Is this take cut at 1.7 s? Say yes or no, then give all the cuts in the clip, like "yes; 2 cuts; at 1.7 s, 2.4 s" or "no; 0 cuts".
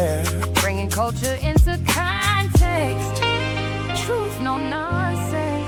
no; 0 cuts